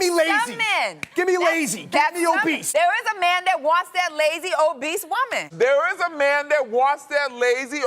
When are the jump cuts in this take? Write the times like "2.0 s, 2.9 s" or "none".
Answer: 2.6 s, 5.4 s